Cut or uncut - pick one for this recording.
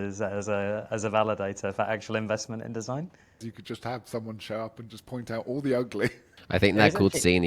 cut